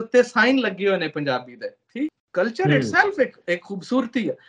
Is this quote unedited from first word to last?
no; 1 cut; at 2.2 s

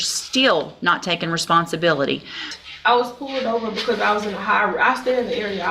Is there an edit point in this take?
yes; 1 cut; at 2.5 s

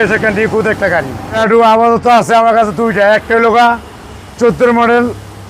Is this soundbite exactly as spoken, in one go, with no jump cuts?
no; 1 cut; at 1.4 s

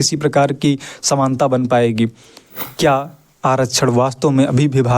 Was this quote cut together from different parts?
yes; 1 cut; at 2.7 s

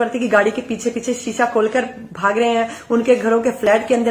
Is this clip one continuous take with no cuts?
yes; 0 cuts

